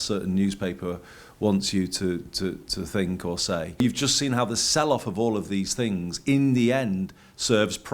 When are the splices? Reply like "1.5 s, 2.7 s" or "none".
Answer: 3.8 s